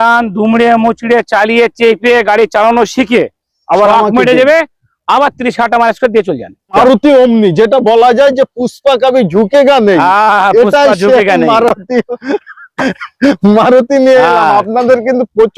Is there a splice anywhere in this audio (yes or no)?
yes